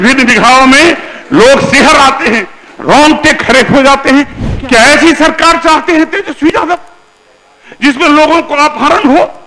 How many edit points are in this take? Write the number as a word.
one